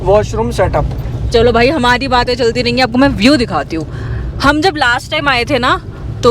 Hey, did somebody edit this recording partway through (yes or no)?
no